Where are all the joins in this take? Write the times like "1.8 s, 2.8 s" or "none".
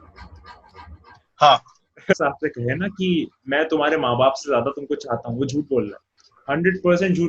2.1 s